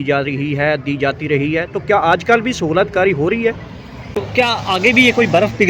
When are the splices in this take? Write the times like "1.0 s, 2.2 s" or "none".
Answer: 4.0 s